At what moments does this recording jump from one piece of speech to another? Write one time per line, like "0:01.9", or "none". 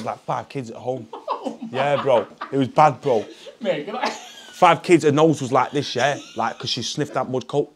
none

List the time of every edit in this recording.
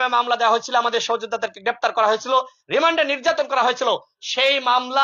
none

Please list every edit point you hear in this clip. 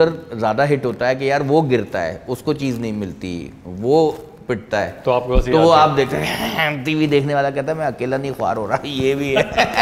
none

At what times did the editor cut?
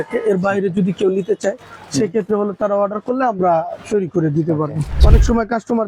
0:05.0

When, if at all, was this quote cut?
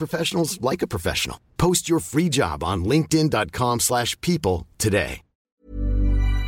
0:05.5

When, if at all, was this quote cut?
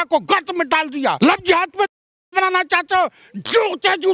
0:01.2

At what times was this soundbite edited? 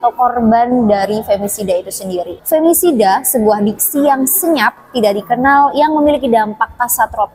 0:02.4

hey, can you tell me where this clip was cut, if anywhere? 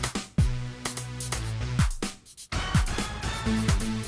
0:02.3

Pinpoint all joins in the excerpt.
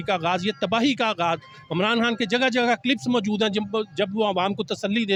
none

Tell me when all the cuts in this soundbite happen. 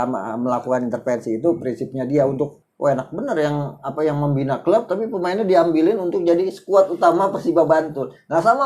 0:02.6

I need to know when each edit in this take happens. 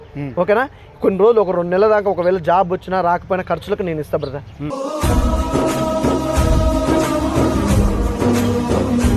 none

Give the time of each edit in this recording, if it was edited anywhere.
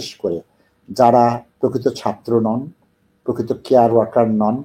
0:01.5

